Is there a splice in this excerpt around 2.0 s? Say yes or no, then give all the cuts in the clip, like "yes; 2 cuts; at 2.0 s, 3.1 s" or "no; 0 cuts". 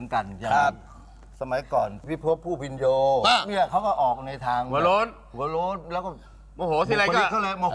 yes; 1 cut; at 2.0 s